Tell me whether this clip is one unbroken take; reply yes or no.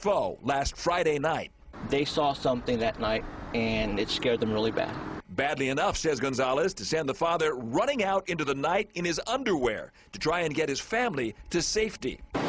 no